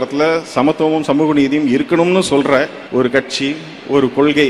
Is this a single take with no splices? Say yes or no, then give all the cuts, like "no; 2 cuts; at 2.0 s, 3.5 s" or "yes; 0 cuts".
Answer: no; 1 cut; at 2.8 s